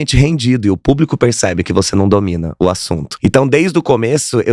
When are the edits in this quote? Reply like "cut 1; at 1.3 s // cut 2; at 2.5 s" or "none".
cut 1; at 3.0 s